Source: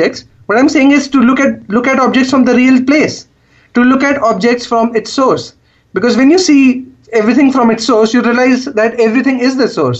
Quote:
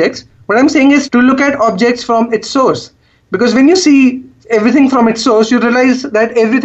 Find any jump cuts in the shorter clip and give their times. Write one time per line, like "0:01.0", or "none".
0:01.1